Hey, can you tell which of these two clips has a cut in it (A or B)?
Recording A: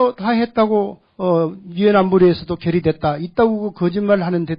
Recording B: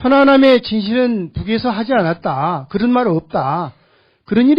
B